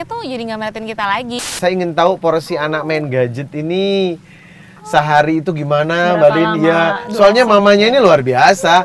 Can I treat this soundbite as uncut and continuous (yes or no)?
no